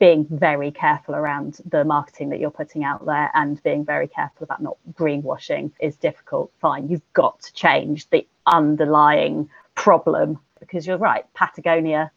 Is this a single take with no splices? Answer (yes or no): no